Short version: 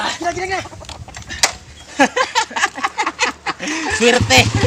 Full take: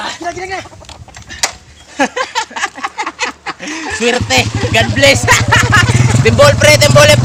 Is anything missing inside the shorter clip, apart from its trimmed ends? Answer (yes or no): no